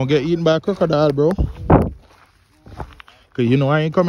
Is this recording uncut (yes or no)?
yes